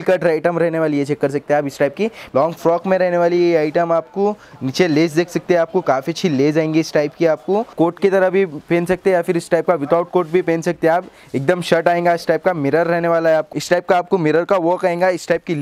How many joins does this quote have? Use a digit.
3